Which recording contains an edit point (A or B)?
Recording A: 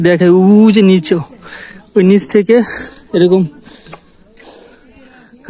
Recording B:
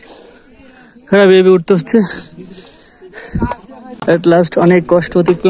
B